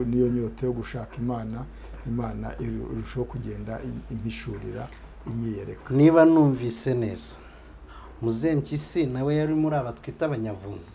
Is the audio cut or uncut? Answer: uncut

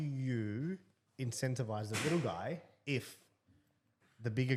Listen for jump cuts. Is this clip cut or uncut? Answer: uncut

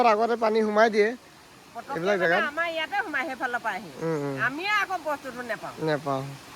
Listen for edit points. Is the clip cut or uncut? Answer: uncut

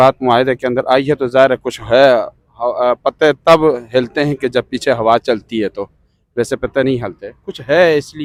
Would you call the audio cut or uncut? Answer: uncut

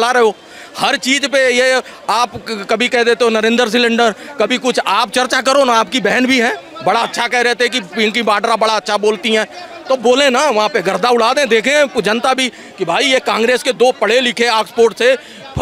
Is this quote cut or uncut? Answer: uncut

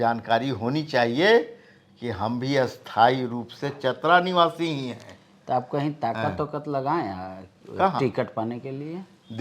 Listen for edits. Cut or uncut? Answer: uncut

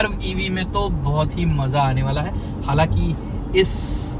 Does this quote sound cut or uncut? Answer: uncut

